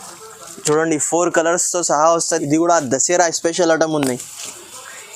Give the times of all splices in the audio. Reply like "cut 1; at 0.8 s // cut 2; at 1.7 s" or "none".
cut 1; at 2.2 s